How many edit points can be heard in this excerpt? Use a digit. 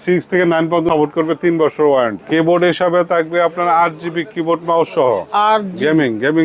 2